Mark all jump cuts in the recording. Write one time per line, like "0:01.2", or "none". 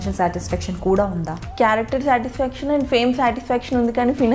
0:01.4